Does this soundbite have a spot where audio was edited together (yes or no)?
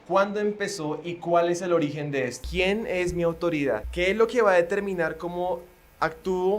yes